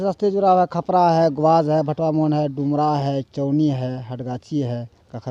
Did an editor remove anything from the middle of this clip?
no; 0 cuts

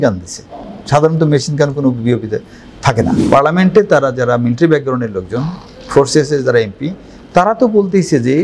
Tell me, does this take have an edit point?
yes; 1 cut; at 3.2 s

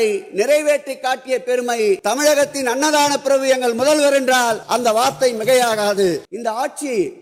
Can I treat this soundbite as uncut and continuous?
no; 3 cuts; at 2.0 s, 4.6 s, 6.3 s

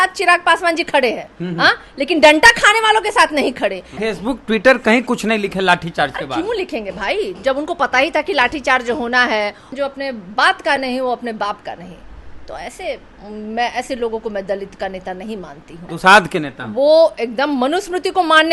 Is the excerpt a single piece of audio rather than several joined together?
no; 3 cuts; at 3.9 s, 9.7 s, 15.9 s

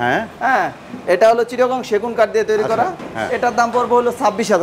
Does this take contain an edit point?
no; 0 cuts

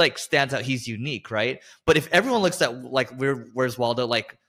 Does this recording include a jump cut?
no; 0 cuts

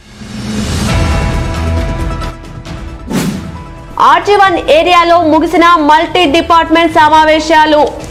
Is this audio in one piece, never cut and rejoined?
yes; 0 cuts

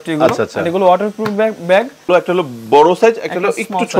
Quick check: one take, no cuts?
no; 1 cut; at 2.1 s

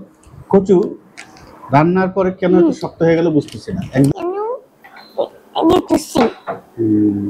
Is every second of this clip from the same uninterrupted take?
no; 1 cut; at 4.1 s

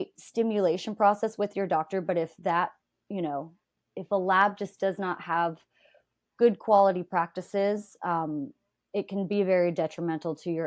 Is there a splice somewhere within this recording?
no; 0 cuts

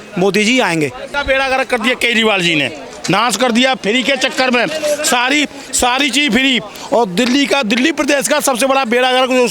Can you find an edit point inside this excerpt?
yes; 1 cut; at 1.2 s

